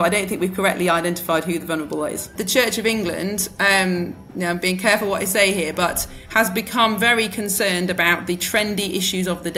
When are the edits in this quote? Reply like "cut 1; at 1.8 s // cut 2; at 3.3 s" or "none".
cut 1; at 2.3 s